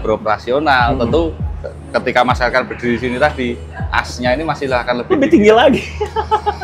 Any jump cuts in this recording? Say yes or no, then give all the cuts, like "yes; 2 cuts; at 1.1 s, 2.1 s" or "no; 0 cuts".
no; 0 cuts